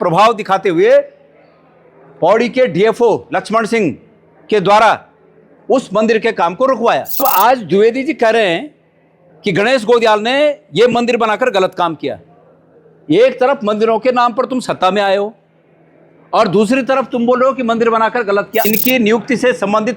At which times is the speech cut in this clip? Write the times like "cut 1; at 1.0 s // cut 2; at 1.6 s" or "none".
cut 1; at 7.2 s // cut 2; at 18.7 s